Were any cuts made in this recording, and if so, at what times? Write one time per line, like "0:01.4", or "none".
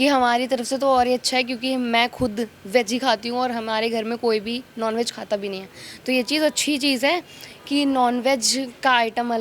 none